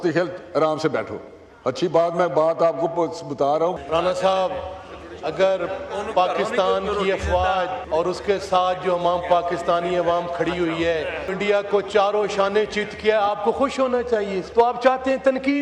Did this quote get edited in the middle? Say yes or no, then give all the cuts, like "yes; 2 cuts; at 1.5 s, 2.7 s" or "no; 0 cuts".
yes; 4 cuts; at 3.8 s, 7.8 s, 11.3 s, 14.4 s